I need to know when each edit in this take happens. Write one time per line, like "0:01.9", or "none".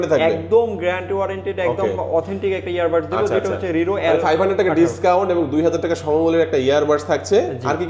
none